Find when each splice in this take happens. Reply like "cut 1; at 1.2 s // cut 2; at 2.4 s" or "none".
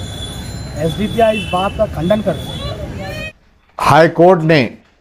cut 1; at 3.2 s